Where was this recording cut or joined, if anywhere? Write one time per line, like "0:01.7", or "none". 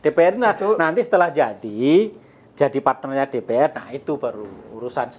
none

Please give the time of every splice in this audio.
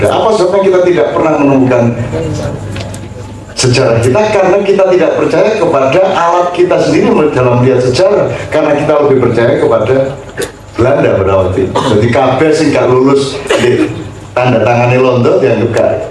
none

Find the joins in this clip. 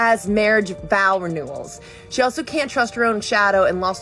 0:02.0

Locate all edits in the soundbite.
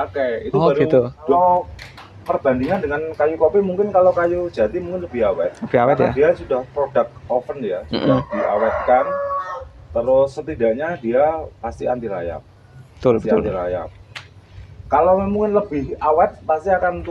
0:01.3

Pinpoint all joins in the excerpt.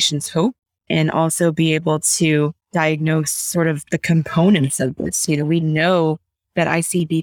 0:02.6

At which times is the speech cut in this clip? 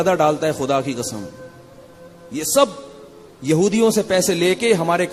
none

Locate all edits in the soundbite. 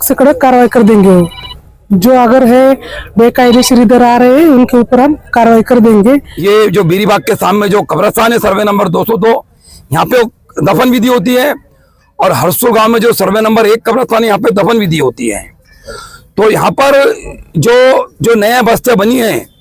0:06.3

